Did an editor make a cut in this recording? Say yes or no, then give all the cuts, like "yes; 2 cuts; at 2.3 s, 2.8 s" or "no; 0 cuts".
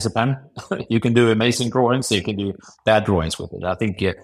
no; 0 cuts